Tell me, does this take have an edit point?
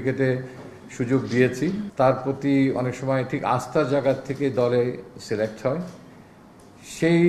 yes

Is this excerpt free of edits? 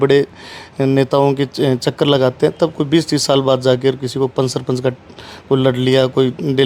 yes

